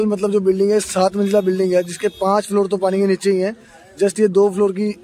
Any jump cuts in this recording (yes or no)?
no